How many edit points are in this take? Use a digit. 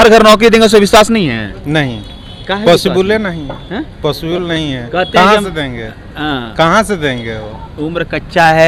0